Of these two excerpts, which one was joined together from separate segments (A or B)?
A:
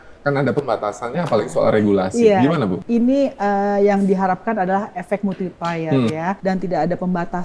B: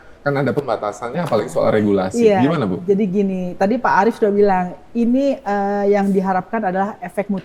A